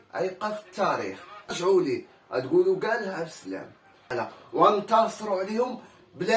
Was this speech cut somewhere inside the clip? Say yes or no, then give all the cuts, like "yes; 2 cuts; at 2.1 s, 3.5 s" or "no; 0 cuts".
yes; 2 cuts; at 1.5 s, 4.1 s